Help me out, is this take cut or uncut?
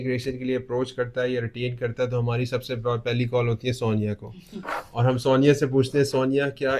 uncut